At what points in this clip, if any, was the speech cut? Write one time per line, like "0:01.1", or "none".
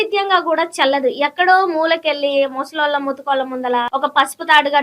0:03.9

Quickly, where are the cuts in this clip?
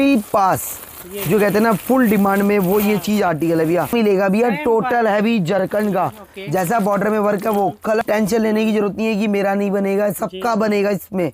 0:03.9
0:08.0

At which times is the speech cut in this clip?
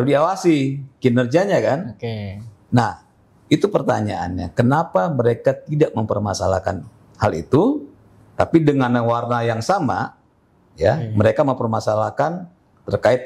none

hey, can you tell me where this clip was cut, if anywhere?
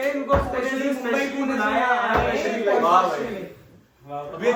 none

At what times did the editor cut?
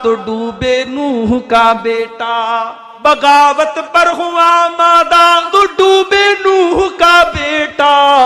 0:02.8
0:05.5

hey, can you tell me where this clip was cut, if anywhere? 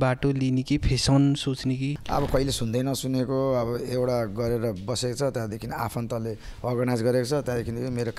0:02.0

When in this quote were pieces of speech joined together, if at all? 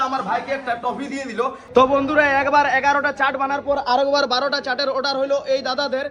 0:01.6

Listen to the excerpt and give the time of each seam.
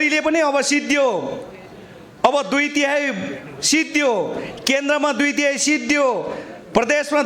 none

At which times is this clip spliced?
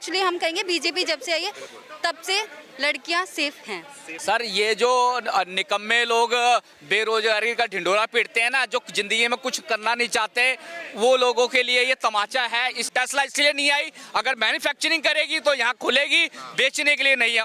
0:04.1
0:12.9

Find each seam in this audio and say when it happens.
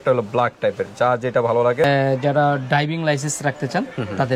0:01.8

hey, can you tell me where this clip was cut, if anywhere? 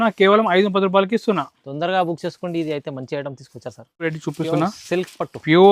0:04.1

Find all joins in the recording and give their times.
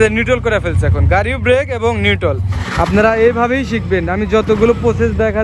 0:02.5

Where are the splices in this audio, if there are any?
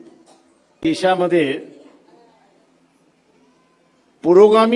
0:00.8
0:03.1

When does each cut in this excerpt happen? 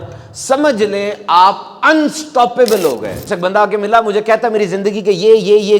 0:03.2

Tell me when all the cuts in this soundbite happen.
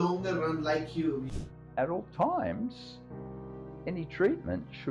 0:01.2

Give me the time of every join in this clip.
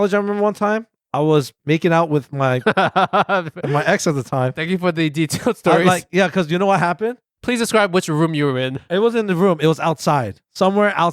0:01.0

